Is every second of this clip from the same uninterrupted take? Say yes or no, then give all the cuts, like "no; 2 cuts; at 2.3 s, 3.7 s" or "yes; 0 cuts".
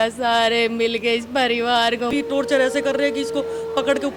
no; 1 cut; at 2.1 s